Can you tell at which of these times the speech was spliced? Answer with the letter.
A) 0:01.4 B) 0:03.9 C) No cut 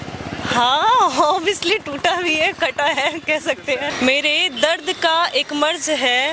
B